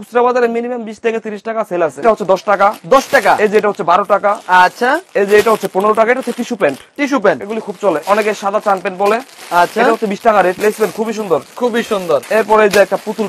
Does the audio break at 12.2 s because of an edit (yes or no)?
yes